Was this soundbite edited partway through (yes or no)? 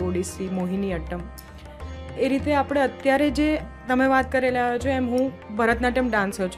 no